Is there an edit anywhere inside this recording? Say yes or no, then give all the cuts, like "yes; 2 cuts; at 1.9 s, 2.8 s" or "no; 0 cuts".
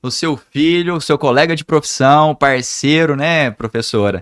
no; 0 cuts